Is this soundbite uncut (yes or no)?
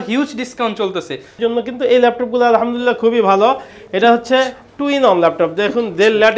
no